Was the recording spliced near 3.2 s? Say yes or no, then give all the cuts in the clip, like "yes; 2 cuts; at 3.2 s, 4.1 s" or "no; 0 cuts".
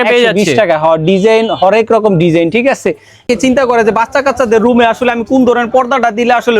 yes; 1 cut; at 3.2 s